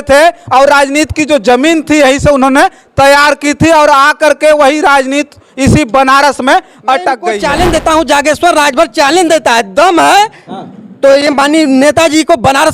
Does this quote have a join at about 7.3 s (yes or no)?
yes